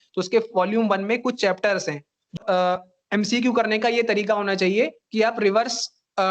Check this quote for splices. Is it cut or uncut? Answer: cut